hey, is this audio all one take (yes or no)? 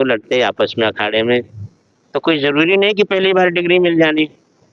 yes